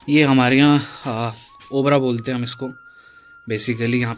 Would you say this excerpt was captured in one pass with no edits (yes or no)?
yes